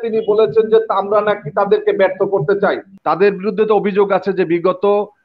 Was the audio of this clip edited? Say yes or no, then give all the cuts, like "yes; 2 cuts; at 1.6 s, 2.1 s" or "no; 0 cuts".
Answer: yes; 1 cut; at 2.9 s